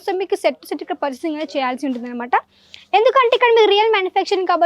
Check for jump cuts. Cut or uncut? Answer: uncut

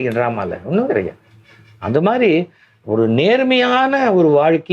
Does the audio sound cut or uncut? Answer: uncut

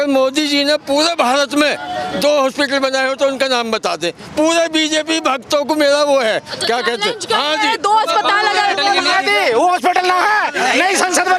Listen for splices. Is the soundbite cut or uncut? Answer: cut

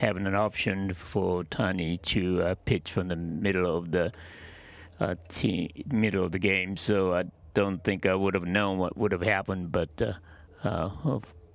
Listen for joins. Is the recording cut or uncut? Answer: uncut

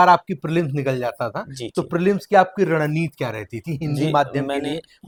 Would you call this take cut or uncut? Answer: uncut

